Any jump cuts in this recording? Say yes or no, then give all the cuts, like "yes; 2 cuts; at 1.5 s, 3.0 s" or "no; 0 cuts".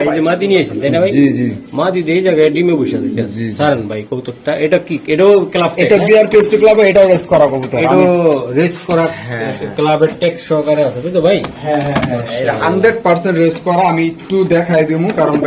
no; 0 cuts